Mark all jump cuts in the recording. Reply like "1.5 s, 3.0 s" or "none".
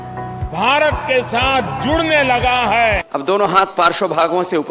3.0 s